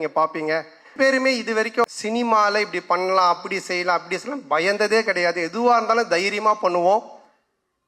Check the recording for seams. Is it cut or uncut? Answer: cut